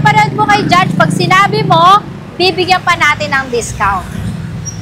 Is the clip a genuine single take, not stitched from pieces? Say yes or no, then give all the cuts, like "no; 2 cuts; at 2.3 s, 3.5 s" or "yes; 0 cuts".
yes; 0 cuts